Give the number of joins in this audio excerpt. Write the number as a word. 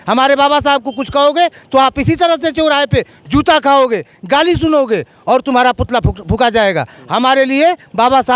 zero